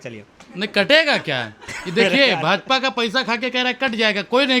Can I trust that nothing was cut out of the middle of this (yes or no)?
yes